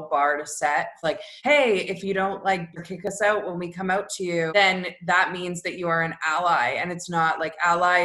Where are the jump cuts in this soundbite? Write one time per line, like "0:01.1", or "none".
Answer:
0:01.1
0:02.8
0:04.5

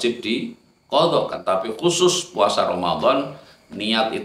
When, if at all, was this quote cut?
0:01.3

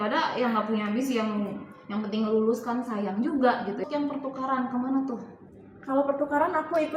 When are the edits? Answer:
0:03.9

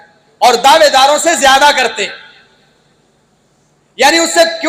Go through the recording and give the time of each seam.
none

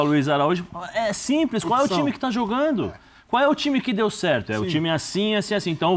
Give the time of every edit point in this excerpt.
none

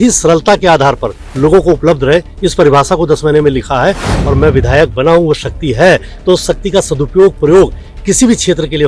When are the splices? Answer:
0:04.1

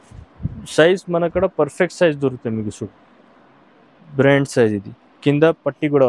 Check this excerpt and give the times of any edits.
none

